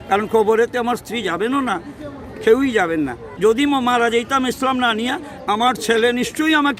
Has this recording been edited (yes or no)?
yes